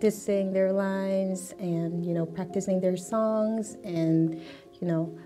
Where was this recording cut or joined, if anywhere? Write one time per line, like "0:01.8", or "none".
none